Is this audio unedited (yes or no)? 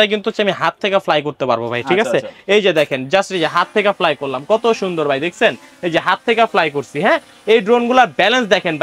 yes